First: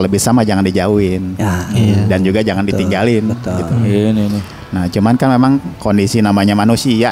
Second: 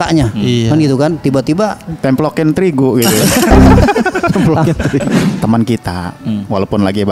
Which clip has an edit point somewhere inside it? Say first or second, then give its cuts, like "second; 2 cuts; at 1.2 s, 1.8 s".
second; 1 cut; at 5.2 s